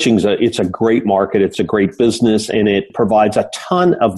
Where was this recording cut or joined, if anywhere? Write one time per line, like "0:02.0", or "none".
0:01.5
0:02.9